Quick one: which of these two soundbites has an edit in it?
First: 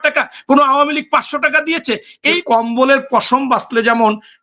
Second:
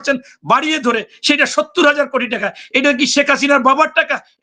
first; 1 cut; at 2.4 s

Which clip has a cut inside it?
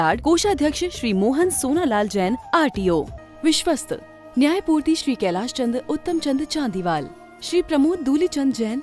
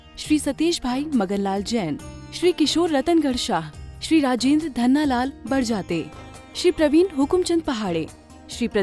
first; 1 cut; at 3.2 s

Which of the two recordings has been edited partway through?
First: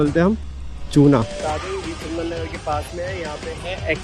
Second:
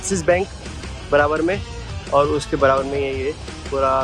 first; 1 cut; at 1.3 s

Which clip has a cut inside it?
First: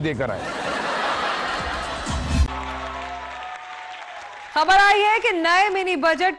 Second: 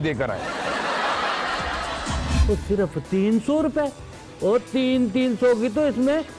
second; 1 cut; at 2.4 s

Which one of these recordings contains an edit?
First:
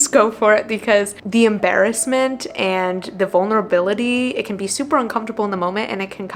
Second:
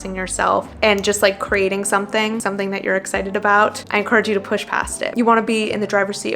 second; 2 cuts; at 2.4 s, 5.1 s

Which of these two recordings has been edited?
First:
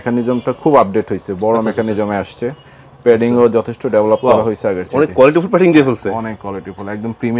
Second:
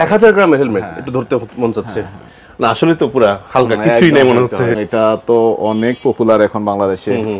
second; 1 cut; at 4.8 s

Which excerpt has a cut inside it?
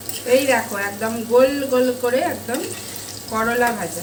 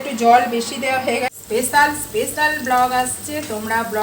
second; 1 cut; at 1.4 s

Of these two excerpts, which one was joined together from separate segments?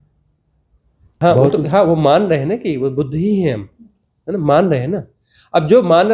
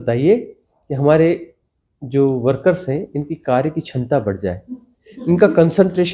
first; 1 cut; at 1.2 s

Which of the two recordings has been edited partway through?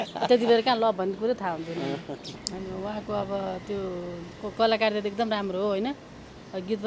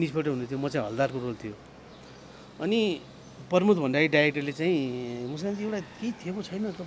first; 1 cut; at 2.3 s

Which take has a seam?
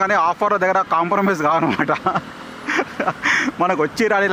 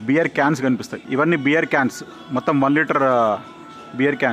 second; 1 cut; at 0.9 s

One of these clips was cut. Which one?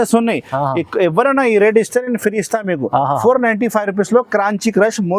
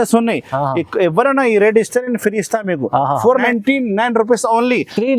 second; 1 cut; at 3.5 s

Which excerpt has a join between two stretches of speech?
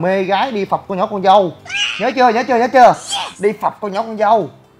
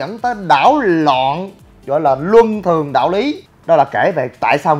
second; 1 cut; at 3.5 s

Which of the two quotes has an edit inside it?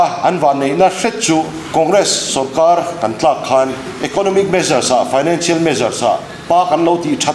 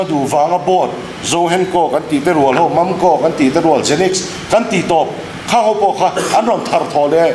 first; 3 cuts; at 1.6 s, 3.9 s, 6.3 s

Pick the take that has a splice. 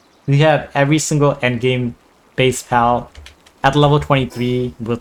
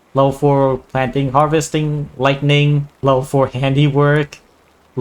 second; 1 cut; at 3.0 s

